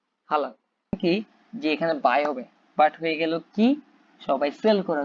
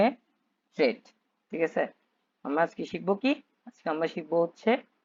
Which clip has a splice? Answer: first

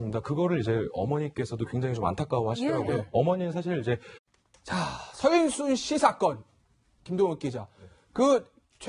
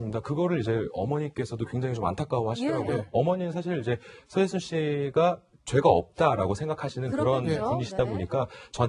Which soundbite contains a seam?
second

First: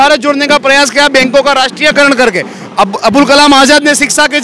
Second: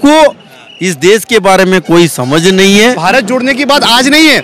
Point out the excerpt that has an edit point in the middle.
second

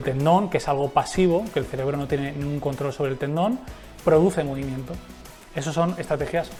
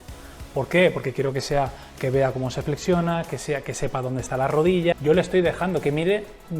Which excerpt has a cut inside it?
second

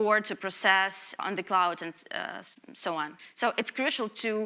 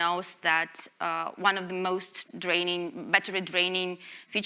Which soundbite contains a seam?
first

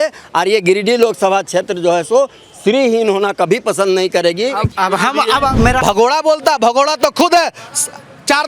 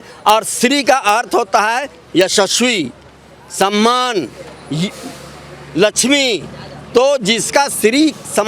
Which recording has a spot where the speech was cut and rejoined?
first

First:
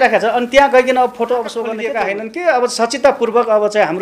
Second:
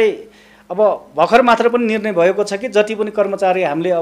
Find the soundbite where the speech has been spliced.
first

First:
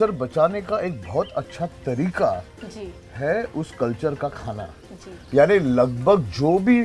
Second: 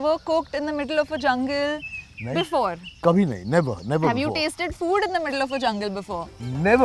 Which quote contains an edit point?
first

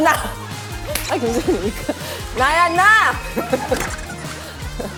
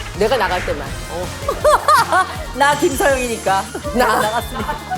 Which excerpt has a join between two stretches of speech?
second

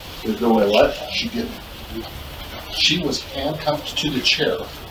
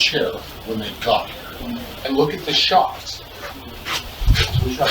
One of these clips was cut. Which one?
second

